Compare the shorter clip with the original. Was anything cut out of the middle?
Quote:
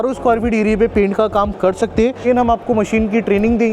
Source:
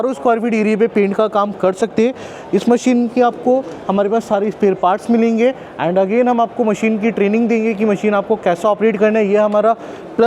yes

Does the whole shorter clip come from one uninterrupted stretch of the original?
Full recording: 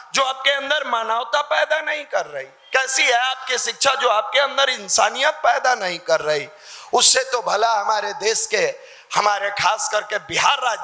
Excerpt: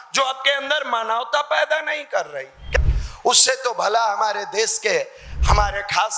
no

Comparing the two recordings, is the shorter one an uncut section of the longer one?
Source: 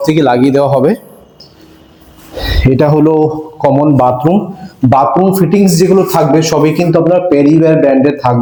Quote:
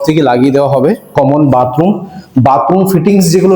no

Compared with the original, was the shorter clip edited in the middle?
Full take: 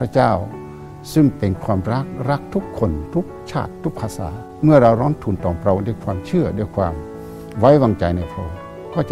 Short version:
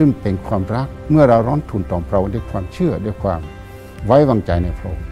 yes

